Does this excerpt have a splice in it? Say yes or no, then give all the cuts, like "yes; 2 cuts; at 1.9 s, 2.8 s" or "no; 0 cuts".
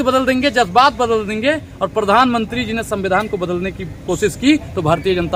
no; 0 cuts